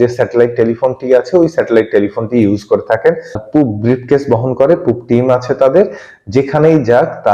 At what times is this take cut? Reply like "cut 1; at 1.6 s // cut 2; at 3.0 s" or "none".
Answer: cut 1; at 3.4 s